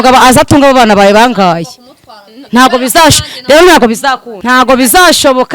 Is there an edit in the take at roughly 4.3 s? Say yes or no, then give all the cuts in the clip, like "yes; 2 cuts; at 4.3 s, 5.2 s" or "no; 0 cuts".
yes; 1 cut; at 4.3 s